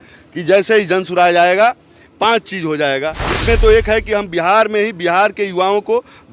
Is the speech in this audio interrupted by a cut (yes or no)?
yes